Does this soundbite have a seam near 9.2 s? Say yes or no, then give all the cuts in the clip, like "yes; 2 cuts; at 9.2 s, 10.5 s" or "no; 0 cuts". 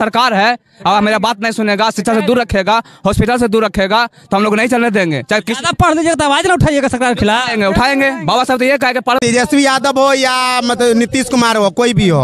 yes; 1 cut; at 9.2 s